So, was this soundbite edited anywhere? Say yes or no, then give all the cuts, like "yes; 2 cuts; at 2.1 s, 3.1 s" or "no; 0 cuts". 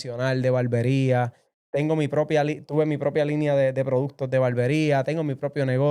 no; 0 cuts